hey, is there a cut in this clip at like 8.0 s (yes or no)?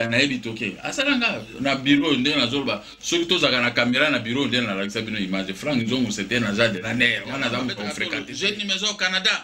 yes